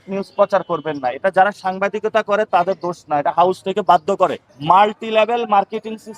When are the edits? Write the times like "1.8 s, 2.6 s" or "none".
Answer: 4.5 s